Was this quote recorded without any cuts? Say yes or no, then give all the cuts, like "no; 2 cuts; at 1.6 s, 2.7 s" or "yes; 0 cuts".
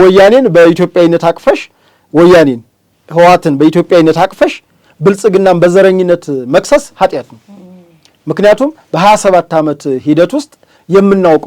yes; 0 cuts